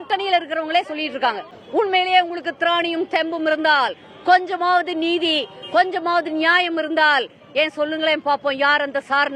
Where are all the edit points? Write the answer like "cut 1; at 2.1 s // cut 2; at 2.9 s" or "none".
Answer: cut 1; at 1.5 s